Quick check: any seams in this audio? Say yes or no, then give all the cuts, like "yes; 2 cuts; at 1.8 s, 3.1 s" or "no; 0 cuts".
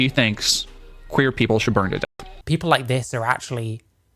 yes; 1 cut; at 2.2 s